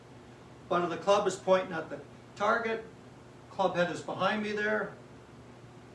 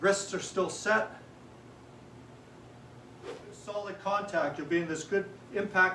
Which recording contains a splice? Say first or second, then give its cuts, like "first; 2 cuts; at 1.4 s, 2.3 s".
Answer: second; 1 cut; at 3.9 s